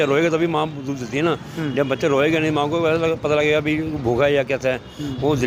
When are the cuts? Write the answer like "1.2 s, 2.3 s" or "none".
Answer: none